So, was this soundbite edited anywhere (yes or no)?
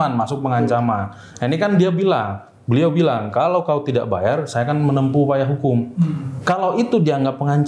no